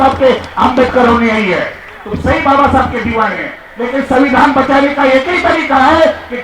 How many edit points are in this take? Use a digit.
1